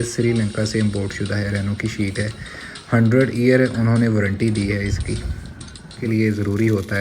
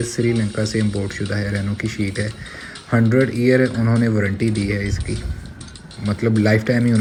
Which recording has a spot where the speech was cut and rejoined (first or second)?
first